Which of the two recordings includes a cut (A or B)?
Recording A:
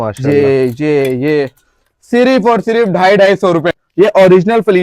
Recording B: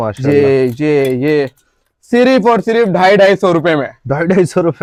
A